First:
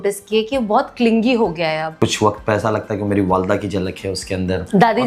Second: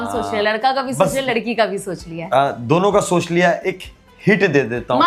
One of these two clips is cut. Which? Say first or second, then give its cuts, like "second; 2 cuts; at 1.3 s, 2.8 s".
first; 1 cut; at 1.9 s